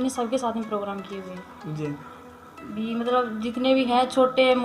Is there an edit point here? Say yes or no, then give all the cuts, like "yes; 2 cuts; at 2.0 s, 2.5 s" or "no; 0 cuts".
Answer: no; 0 cuts